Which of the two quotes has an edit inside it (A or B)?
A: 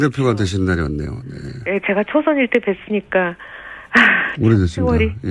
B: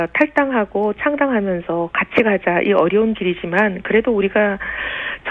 A